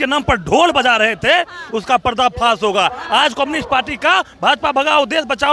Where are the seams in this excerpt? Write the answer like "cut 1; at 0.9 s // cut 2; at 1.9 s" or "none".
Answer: none